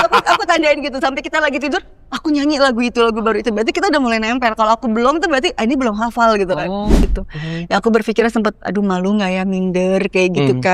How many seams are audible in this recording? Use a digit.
1